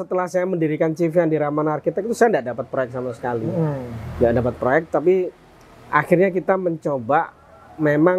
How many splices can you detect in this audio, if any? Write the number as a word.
zero